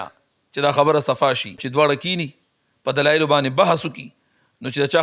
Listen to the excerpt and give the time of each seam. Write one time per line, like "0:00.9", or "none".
0:01.6